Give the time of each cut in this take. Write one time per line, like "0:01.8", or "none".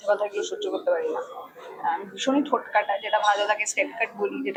none